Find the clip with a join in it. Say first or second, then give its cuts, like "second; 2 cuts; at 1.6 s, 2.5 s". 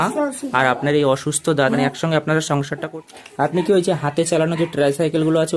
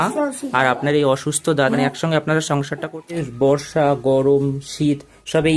second; 1 cut; at 3.3 s